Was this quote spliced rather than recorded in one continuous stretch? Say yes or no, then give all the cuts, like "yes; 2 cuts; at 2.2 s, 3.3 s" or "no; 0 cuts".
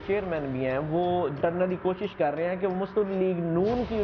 yes; 1 cut; at 1.4 s